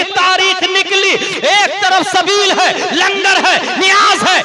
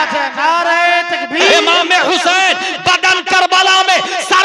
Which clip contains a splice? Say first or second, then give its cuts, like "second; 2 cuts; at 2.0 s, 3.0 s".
second; 1 cut; at 1.4 s